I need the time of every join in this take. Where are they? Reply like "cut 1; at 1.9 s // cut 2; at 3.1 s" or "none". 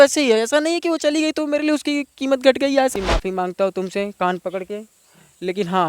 cut 1; at 2.9 s